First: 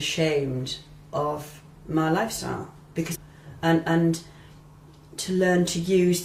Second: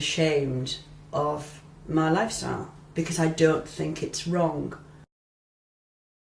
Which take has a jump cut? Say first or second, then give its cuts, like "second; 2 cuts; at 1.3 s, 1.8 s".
second; 1 cut; at 3.1 s